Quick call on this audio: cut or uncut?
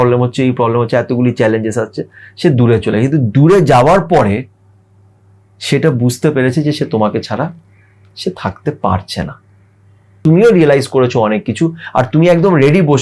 cut